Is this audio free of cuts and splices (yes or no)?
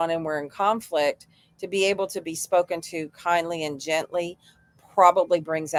yes